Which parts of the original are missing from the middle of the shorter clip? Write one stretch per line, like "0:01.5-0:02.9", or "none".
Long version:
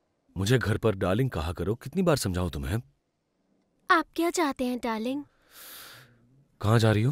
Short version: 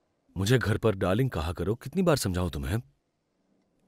none